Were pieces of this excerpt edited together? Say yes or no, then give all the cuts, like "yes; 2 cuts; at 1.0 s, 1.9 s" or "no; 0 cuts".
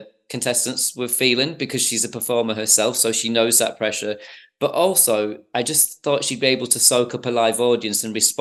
no; 0 cuts